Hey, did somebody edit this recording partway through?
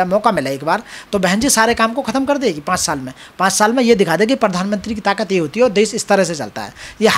no; 0 cuts

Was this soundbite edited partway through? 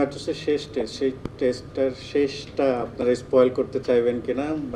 no; 0 cuts

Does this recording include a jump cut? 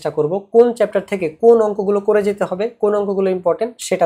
no; 0 cuts

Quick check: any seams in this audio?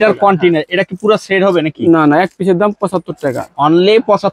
no; 0 cuts

